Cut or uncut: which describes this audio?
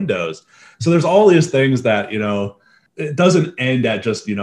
cut